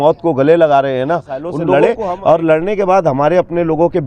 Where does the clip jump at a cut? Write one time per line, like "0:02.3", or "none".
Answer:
0:01.6